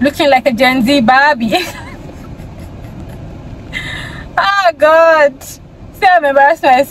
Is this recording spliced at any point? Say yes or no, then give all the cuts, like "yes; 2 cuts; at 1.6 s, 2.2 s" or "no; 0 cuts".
no; 0 cuts